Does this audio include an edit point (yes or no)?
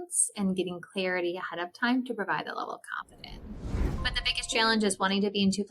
yes